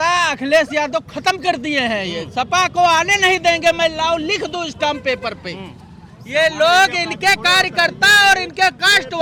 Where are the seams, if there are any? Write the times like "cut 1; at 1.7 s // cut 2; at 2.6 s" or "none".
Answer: none